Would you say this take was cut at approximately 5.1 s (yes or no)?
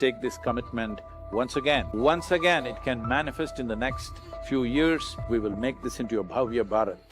yes